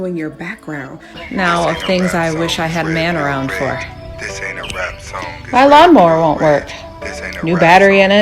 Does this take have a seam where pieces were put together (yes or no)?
yes